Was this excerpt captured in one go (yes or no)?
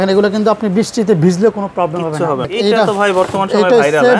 no